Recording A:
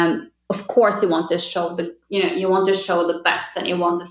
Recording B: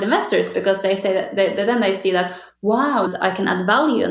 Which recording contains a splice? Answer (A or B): B